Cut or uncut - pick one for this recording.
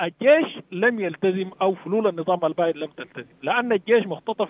uncut